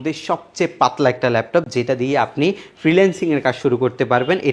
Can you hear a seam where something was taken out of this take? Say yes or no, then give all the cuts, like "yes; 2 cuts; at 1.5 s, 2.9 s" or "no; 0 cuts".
no; 0 cuts